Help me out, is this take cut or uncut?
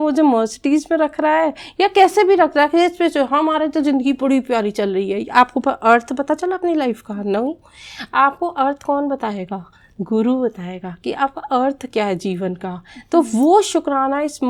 uncut